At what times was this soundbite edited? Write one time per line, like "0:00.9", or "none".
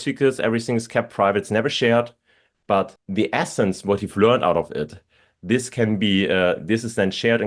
0:03.0